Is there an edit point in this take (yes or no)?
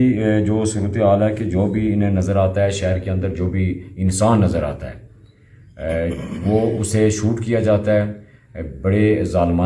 no